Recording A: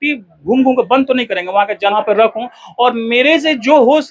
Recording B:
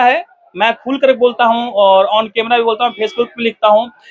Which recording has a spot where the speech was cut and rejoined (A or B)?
A